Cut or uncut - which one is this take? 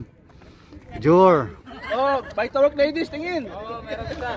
uncut